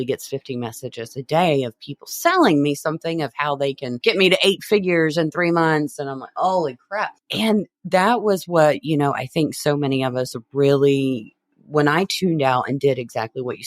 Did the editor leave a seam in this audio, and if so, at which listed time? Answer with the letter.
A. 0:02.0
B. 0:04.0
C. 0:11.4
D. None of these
B